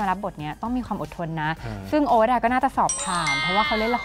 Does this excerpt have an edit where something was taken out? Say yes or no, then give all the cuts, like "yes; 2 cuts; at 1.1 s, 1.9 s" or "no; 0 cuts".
no; 0 cuts